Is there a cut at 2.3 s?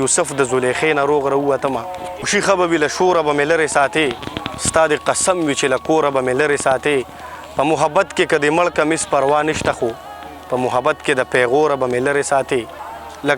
yes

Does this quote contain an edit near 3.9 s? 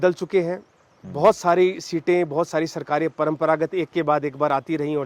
no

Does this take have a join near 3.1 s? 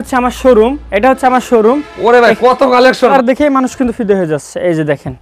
yes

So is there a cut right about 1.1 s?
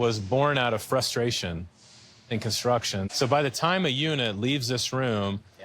no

